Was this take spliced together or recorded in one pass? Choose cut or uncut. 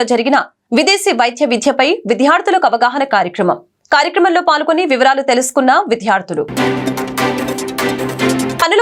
uncut